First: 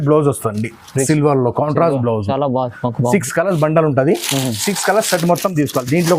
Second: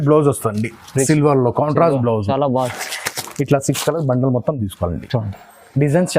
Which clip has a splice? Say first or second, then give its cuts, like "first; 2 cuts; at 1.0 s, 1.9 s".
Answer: second; 1 cut; at 2.7 s